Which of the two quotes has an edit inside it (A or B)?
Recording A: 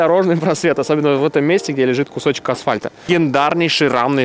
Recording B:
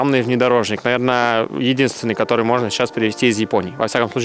A